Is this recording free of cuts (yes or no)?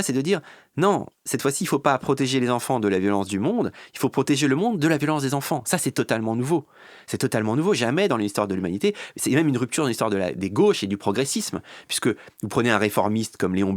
yes